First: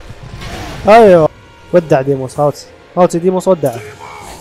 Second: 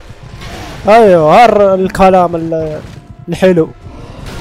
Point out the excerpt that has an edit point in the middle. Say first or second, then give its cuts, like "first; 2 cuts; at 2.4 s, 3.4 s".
first; 1 cut; at 1.3 s